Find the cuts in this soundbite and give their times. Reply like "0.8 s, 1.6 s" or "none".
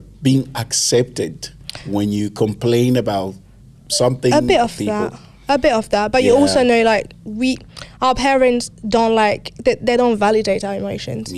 none

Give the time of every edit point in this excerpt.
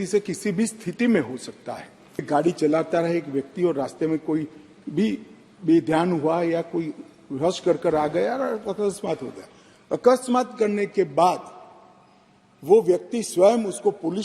2.3 s

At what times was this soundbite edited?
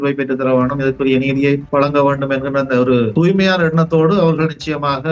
1.6 s, 3.1 s

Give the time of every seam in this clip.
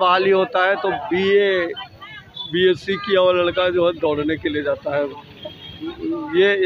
none

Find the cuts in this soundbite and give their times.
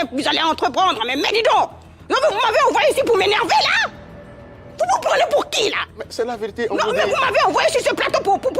none

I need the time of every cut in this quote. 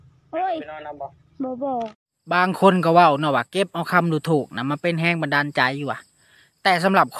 1.9 s

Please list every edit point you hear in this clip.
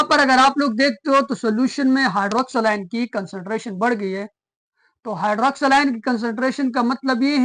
none

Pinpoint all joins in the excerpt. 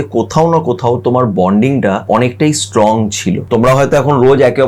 2.0 s, 3.4 s

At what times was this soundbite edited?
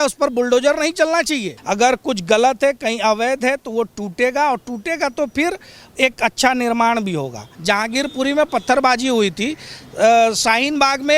1.5 s, 7.5 s

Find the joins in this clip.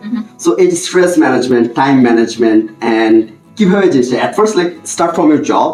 none

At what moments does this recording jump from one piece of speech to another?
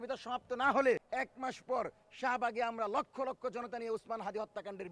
1.1 s

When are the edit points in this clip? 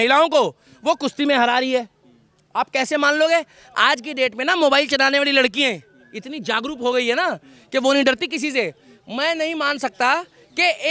none

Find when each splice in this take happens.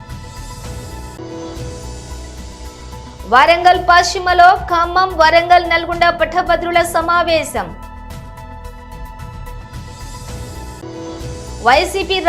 7.8 s, 9.6 s, 11.5 s

